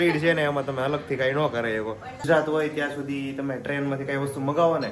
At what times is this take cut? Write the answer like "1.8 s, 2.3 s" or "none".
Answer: 2.2 s